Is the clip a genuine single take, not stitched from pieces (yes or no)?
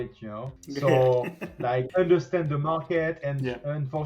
no